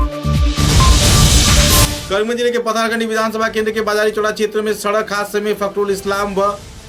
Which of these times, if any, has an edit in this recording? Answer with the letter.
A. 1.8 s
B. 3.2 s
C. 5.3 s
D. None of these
D